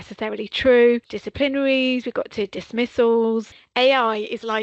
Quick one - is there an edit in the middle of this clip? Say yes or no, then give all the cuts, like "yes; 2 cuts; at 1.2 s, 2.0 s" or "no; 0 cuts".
yes; 2 cuts; at 1.2 s, 3.6 s